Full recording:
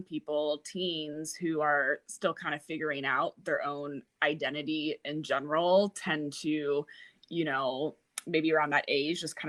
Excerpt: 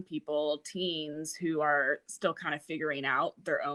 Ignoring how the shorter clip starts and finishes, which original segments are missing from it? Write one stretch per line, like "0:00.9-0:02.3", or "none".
none

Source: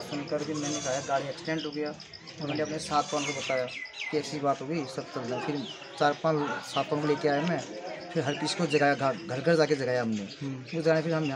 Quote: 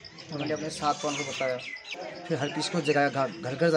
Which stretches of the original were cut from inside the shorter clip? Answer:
0:04.0-0:07.7

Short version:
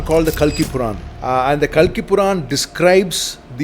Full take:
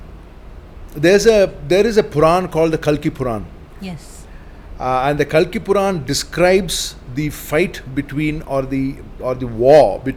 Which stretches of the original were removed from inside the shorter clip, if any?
0:03.5-0:04.7

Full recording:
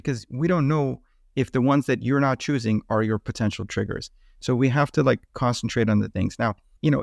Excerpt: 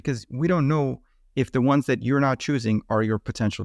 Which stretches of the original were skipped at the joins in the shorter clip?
none

